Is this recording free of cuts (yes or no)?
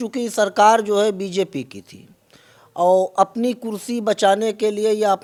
yes